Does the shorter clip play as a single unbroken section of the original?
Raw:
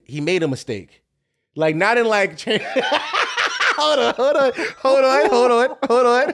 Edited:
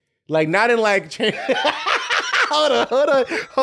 yes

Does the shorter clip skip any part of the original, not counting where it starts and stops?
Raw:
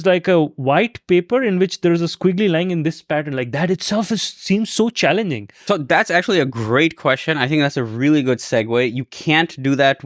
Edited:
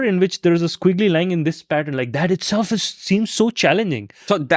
no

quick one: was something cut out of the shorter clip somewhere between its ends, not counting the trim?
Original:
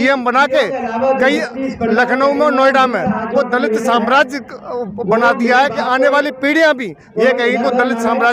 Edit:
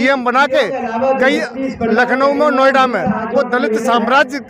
no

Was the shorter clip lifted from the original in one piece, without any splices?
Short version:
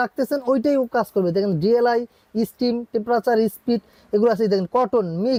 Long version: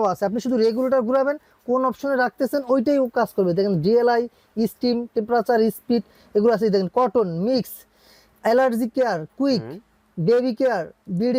yes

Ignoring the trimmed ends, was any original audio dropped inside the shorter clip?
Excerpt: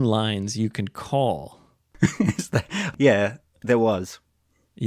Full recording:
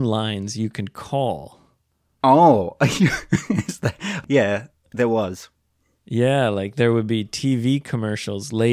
yes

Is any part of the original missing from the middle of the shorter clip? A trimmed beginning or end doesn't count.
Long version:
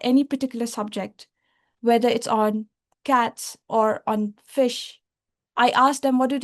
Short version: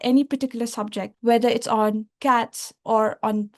yes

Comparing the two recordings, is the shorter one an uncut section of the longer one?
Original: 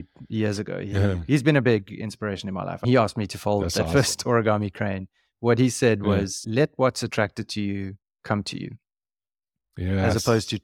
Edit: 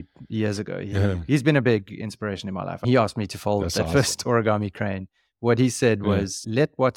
yes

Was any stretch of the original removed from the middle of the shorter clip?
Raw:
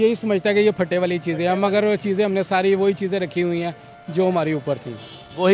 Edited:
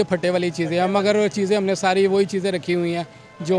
no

